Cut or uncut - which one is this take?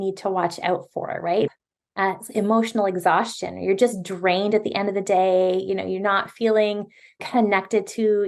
cut